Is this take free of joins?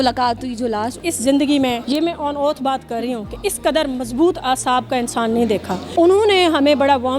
no; 3 cuts; at 1.0 s, 1.8 s, 5.8 s

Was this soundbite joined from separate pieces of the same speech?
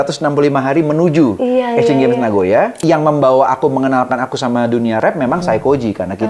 yes; 1 cut; at 2.8 s

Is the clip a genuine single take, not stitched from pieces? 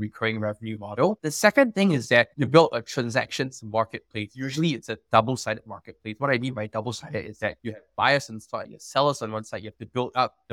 yes; 0 cuts

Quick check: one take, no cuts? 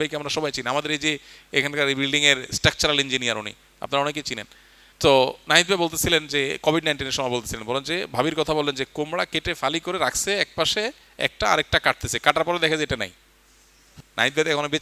yes; 0 cuts

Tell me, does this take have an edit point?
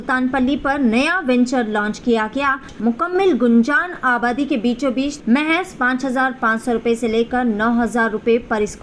yes; 2 cuts; at 2.7 s, 5.1 s

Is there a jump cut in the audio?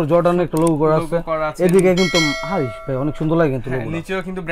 no; 0 cuts

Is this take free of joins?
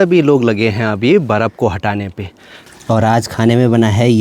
no; 1 cut; at 2.7 s

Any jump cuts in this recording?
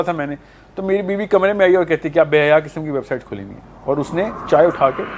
no; 0 cuts

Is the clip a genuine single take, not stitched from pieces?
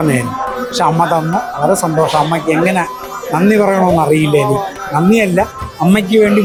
yes; 0 cuts

